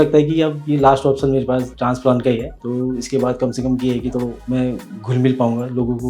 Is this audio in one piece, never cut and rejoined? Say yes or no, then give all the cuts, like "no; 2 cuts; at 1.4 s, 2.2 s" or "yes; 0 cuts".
no; 2 cuts; at 2.6 s, 4.4 s